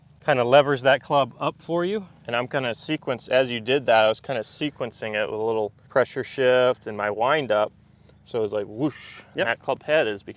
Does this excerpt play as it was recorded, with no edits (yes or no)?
no